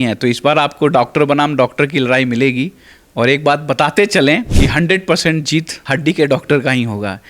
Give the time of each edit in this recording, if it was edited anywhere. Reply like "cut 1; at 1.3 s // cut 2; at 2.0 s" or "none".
cut 1; at 4.5 s // cut 2; at 5.8 s